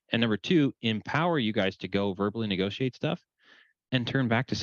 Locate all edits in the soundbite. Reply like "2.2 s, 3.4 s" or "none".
none